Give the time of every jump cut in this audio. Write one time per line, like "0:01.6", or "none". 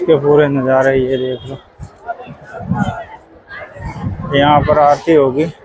none